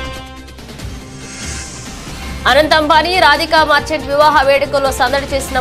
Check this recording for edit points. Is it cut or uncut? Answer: cut